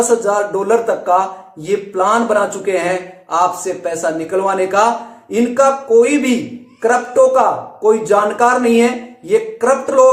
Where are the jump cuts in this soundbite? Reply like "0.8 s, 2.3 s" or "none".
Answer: none